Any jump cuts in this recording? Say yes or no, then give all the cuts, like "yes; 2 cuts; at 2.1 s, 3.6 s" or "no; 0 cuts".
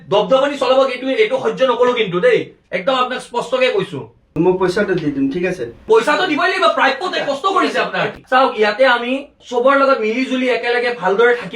yes; 1 cut; at 8.2 s